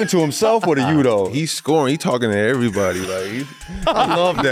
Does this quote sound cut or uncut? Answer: cut